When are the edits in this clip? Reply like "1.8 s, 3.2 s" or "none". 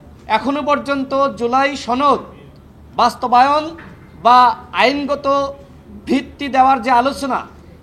none